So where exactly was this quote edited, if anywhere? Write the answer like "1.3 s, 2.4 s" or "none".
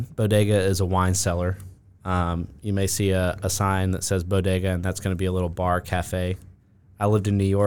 none